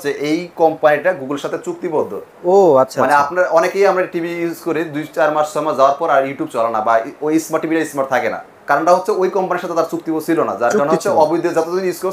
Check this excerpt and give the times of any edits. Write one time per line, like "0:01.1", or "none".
none